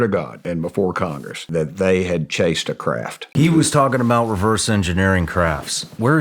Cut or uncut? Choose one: uncut